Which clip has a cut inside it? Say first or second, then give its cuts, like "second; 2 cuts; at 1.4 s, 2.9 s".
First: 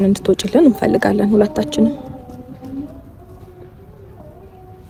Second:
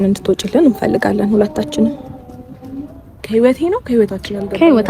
second; 1 cut; at 3.2 s